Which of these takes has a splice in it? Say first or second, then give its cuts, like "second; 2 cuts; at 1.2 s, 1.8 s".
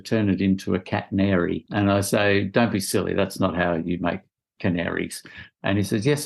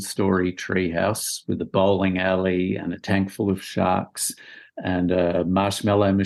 first; 1 cut; at 1.6 s